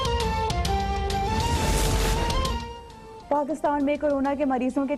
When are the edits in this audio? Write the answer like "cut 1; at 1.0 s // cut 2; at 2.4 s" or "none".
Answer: cut 1; at 1.3 s